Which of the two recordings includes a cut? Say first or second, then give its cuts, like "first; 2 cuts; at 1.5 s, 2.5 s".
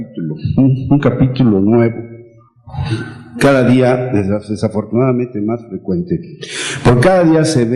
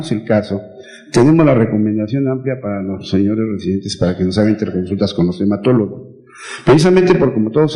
first; 1 cut; at 4.5 s